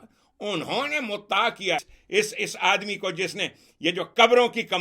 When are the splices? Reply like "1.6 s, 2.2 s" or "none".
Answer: 1.9 s